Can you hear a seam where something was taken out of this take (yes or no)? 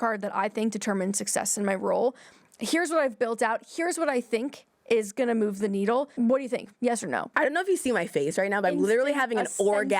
yes